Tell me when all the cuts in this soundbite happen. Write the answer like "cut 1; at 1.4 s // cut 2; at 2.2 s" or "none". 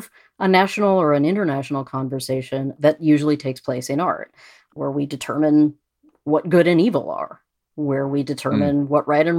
cut 1; at 2.8 s // cut 2; at 4.7 s